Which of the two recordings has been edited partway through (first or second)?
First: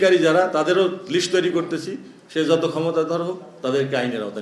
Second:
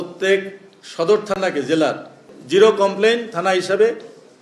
second